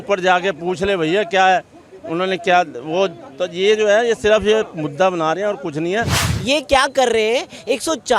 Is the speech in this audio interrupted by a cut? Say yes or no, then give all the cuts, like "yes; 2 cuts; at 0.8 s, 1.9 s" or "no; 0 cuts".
yes; 1 cut; at 6.3 s